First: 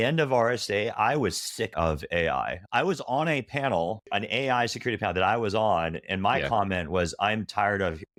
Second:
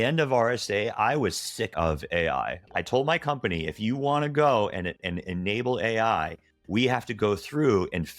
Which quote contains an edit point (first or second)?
second